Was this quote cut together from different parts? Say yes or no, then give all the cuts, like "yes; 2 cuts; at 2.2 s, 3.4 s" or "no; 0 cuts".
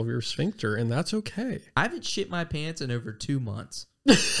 yes; 1 cut; at 1.6 s